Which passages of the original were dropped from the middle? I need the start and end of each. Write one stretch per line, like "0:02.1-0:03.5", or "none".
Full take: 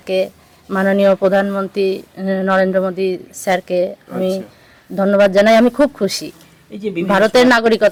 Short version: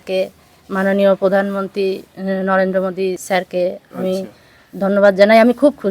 0:03.2-0:03.4